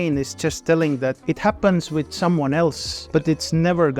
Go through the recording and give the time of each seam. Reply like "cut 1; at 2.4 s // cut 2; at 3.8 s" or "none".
cut 1; at 1.2 s // cut 2; at 2.9 s